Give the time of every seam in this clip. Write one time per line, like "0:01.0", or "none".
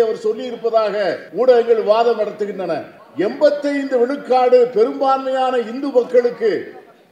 0:01.2
0:03.0